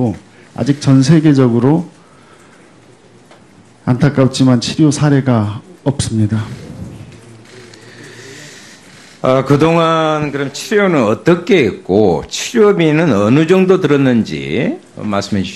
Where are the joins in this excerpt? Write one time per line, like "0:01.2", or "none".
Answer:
0:01.6